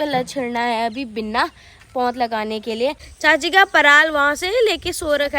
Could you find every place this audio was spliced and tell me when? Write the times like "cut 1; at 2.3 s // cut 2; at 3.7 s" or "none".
cut 1; at 3.1 s